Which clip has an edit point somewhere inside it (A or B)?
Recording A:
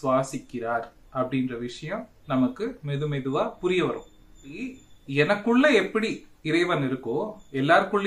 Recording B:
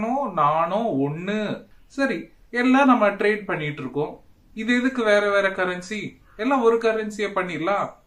B